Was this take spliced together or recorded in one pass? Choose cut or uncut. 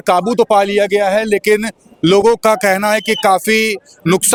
uncut